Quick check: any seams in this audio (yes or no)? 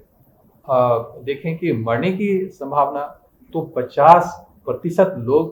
no